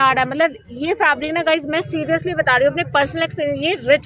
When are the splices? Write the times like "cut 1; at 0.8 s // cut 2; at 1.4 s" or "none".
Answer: none